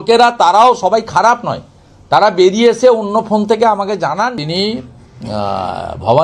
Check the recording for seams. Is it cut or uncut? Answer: cut